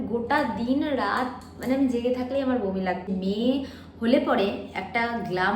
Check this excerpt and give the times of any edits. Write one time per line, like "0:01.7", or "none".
0:03.1